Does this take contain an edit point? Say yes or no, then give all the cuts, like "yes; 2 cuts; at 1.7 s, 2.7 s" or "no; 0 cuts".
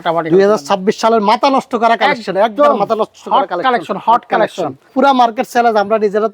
yes; 1 cut; at 4.9 s